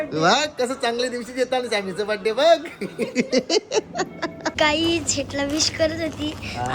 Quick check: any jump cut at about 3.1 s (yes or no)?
no